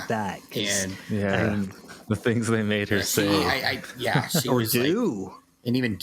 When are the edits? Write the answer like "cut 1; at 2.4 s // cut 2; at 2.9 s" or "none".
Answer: none